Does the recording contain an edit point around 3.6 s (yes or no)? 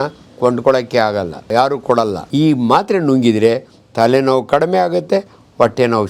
no